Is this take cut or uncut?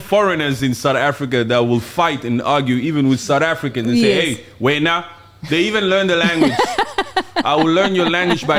uncut